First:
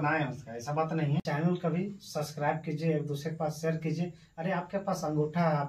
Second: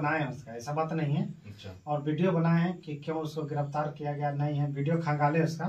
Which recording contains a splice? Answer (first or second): first